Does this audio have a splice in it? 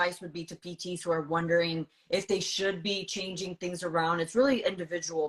no; 0 cuts

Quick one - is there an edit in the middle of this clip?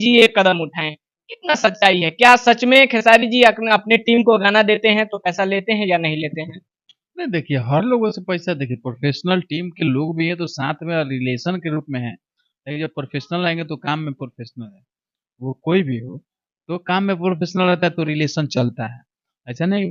no; 0 cuts

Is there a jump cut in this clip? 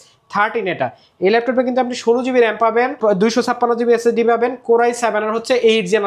yes; 1 cut; at 3.0 s

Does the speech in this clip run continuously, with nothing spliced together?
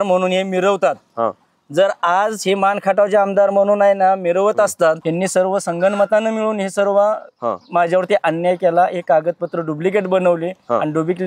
no; 1 cut; at 5.0 s

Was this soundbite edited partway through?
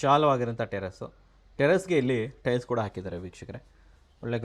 no; 0 cuts

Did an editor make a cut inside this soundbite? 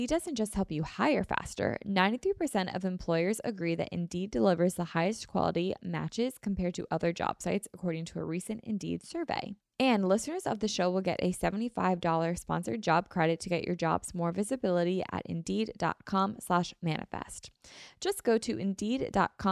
yes; 1 cut; at 9.6 s

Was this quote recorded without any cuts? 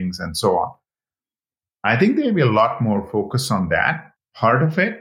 no; 1 cut; at 4.1 s

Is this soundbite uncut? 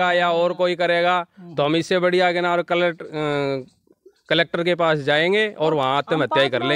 yes; 0 cuts

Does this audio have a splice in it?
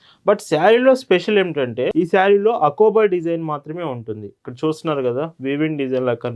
yes; 1 cut; at 1.9 s

